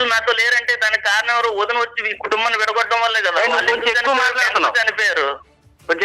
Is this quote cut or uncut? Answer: uncut